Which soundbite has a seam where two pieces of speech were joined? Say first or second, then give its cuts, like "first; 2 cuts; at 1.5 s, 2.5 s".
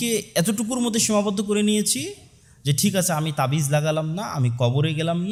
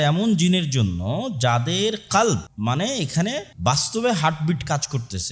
second; 2 cuts; at 2.5 s, 3.5 s